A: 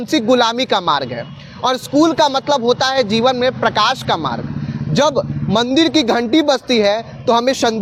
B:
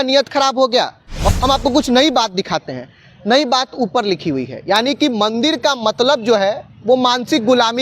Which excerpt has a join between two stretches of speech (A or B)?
B